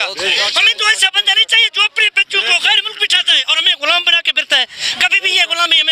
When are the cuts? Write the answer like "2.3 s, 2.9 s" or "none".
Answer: none